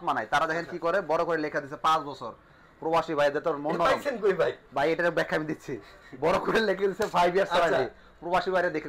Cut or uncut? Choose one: uncut